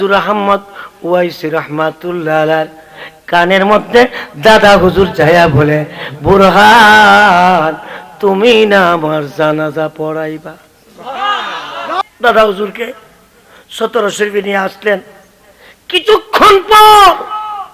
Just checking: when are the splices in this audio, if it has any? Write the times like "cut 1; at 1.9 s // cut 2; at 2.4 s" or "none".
cut 1; at 12.0 s